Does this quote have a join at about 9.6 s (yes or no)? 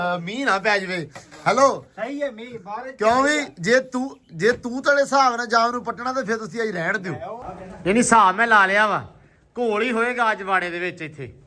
no